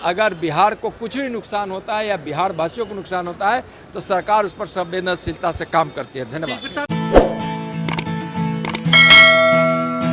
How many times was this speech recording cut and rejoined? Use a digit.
0